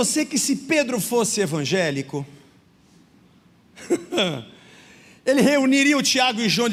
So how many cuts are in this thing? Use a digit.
0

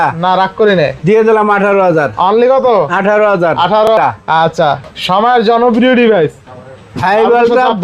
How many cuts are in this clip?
1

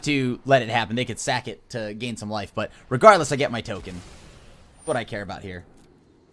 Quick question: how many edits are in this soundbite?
0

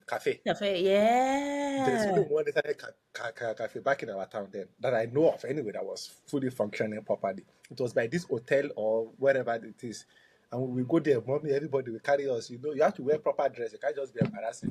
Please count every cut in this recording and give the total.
0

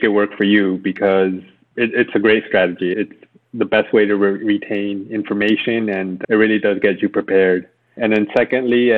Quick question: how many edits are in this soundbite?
1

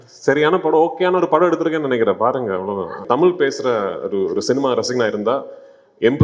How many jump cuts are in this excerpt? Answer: 1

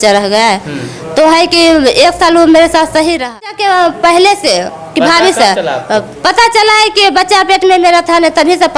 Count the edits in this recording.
1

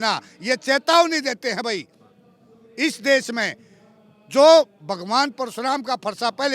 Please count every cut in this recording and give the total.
0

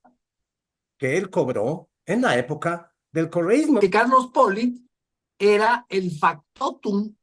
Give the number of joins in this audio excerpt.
1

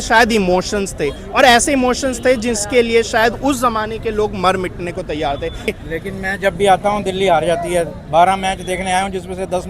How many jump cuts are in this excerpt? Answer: 1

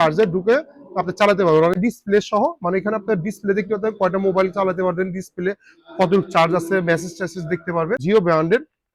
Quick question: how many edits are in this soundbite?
2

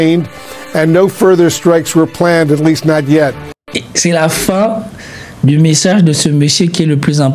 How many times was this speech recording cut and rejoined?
1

